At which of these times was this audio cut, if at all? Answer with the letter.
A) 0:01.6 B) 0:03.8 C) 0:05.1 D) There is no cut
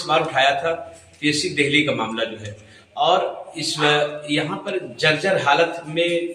D